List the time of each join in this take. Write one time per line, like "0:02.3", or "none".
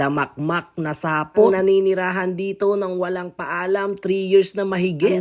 none